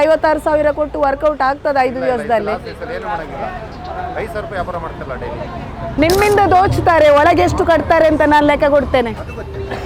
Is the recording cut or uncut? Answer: cut